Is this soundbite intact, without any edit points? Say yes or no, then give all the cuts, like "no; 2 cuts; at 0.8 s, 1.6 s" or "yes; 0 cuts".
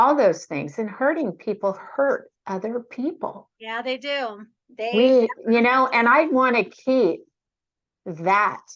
yes; 0 cuts